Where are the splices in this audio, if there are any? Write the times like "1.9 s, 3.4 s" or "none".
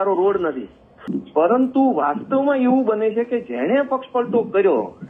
1.1 s